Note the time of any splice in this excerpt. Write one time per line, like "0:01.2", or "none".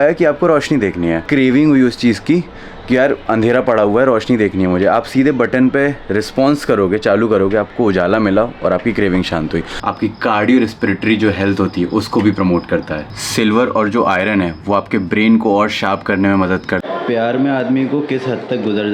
0:01.2
0:09.7
0:16.8